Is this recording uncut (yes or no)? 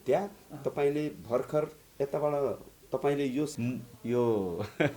no